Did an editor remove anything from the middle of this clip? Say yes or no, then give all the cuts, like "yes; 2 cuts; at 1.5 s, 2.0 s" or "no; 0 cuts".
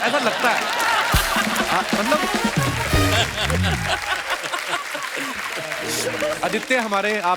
yes; 1 cut; at 6.4 s